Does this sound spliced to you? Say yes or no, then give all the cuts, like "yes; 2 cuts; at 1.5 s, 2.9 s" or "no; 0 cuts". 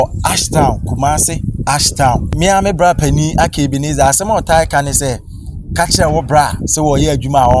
yes; 1 cut; at 2.3 s